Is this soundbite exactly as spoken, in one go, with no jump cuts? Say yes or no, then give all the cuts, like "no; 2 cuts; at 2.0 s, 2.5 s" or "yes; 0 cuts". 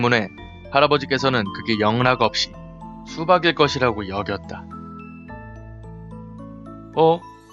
no; 1 cut; at 4.0 s